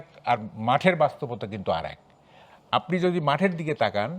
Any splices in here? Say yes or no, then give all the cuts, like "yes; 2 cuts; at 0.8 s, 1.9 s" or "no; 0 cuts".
no; 0 cuts